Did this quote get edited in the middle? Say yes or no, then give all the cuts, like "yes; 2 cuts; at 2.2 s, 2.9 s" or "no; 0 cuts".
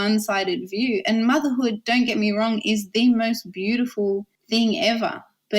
yes; 1 cut; at 4.3 s